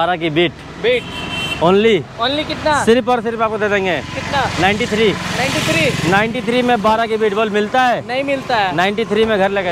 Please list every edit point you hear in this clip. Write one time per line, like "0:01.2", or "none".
none